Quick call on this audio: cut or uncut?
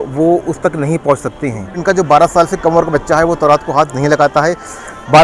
cut